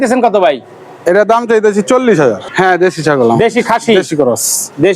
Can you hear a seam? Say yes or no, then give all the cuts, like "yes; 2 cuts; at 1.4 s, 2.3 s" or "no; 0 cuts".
yes; 1 cut; at 2.5 s